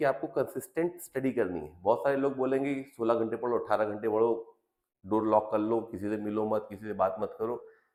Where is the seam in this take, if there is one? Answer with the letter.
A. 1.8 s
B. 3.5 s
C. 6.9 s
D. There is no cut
D